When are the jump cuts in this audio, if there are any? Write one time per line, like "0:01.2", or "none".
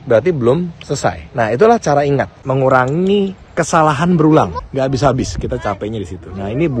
0:01.2
0:02.4
0:04.6